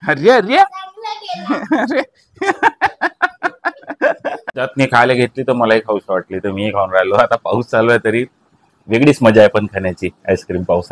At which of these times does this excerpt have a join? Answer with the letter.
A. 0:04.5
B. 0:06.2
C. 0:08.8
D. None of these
A